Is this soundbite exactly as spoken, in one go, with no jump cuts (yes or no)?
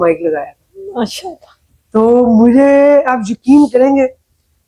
yes